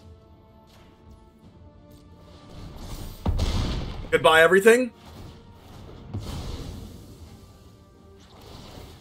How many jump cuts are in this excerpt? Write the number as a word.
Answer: zero